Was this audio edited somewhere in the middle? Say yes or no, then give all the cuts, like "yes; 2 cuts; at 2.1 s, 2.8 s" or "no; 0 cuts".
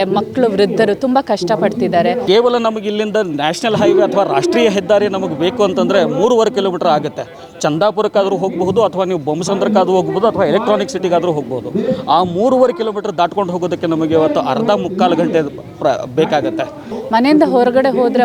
yes; 2 cuts; at 2.2 s, 16.9 s